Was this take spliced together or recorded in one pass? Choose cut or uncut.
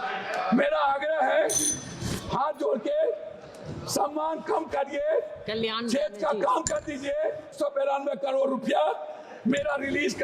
cut